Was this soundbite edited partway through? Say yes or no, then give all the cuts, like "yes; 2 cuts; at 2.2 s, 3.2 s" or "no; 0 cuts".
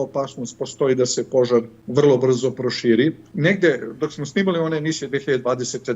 yes; 2 cuts; at 1.8 s, 3.3 s